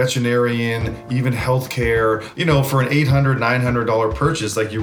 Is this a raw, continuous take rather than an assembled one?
no; 1 cut; at 2.3 s

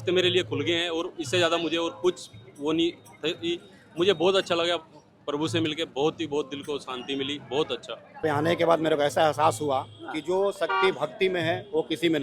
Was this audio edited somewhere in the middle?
yes; 1 cut; at 8.2 s

